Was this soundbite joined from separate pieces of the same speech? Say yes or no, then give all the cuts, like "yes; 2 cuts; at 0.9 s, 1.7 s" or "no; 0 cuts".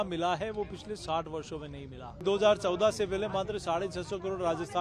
yes; 1 cut; at 2.2 s